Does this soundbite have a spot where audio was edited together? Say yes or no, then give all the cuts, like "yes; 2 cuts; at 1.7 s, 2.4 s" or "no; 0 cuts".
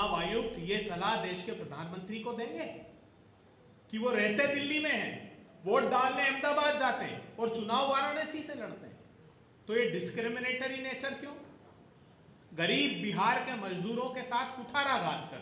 no; 0 cuts